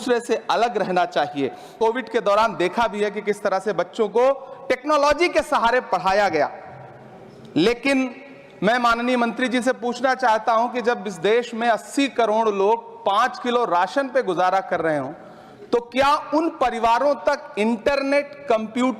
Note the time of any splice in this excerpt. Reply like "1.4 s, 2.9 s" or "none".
1.7 s